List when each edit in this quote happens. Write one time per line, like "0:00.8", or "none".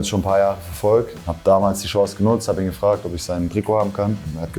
0:01.2